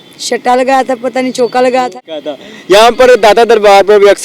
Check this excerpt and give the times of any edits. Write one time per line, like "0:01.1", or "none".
0:01.9